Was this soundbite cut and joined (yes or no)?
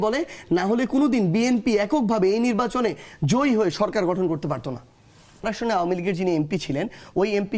yes